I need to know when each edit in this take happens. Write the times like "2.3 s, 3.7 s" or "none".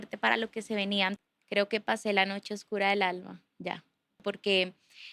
1.2 s, 4.2 s